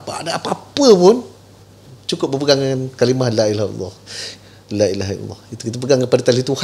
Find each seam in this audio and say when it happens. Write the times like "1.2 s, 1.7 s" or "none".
none